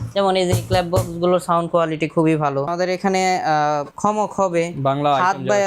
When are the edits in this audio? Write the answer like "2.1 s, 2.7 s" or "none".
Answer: 2.7 s, 3.9 s